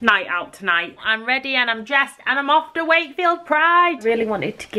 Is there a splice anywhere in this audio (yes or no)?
yes